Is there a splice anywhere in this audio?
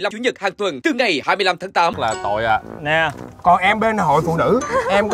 yes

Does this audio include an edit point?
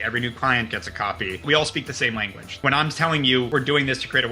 yes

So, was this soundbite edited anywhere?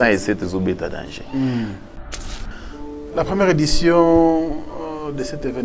yes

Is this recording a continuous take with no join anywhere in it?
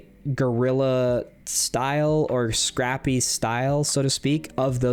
yes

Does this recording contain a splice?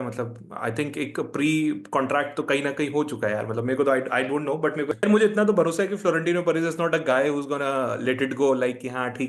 yes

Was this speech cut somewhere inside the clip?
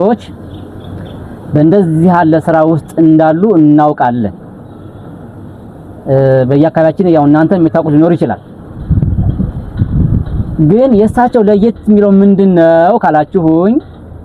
no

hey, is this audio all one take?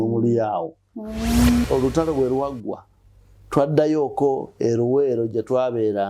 no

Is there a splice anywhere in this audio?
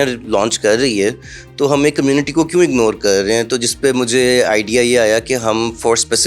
no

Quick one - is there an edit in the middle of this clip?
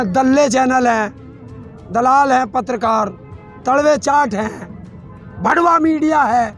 no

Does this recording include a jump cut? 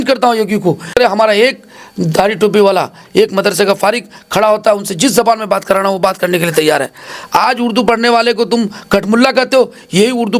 yes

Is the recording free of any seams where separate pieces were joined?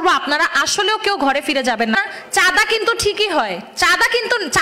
no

